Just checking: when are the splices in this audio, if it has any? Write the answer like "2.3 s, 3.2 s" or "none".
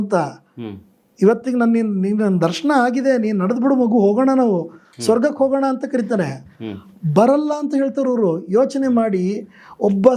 none

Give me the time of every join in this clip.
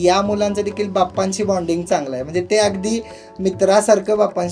none

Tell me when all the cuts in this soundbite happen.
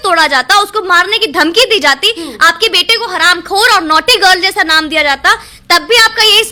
none

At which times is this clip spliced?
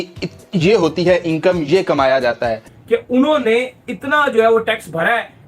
2.7 s

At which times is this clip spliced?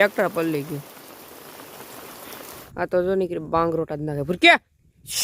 2.6 s

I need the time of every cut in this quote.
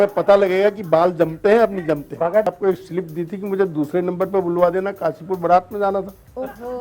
2.5 s

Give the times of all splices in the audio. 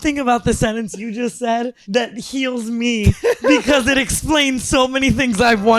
1.8 s

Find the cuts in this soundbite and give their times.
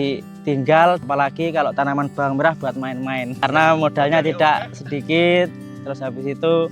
1.0 s

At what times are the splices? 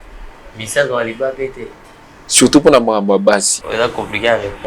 3.6 s

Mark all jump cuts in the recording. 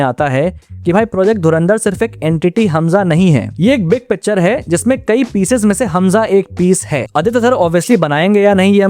7.1 s

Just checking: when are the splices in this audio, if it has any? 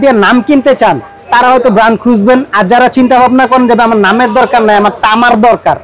none

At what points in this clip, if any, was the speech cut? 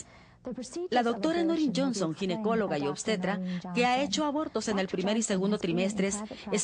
1.7 s

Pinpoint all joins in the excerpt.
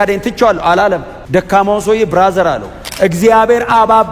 1.1 s, 2.8 s

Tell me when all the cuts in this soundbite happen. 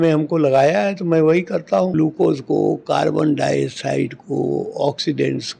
1.9 s

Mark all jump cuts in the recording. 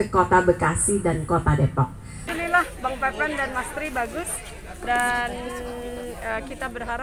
2.3 s

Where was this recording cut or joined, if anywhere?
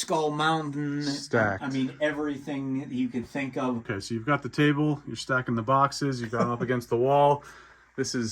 3.9 s

